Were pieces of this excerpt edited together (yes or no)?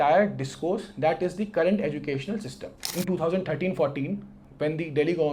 yes